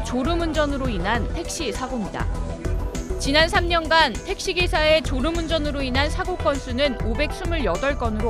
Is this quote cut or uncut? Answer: uncut